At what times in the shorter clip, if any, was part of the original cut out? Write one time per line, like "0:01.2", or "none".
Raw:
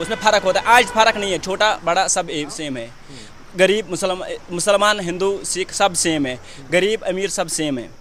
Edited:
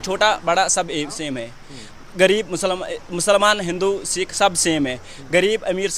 none